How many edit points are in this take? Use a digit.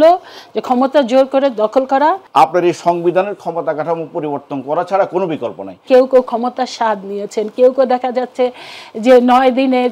2